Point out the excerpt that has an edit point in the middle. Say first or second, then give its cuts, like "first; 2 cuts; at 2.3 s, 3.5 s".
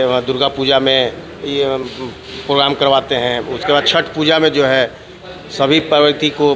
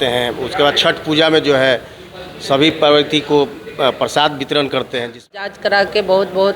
second; 1 cut; at 5.4 s